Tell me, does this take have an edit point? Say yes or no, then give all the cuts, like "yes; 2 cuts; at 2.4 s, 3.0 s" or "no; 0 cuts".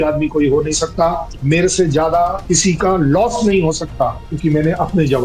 no; 0 cuts